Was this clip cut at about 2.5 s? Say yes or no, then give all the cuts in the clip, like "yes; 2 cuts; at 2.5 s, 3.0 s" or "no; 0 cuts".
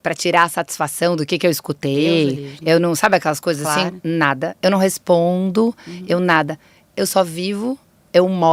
no; 0 cuts